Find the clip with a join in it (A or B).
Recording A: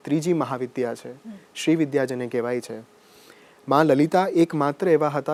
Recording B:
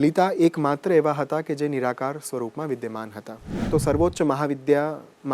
B